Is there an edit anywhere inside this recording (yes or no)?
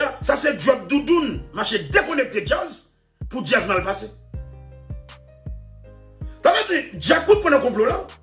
no